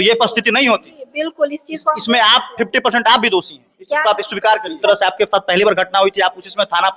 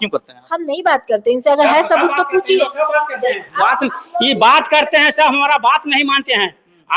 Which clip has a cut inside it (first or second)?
first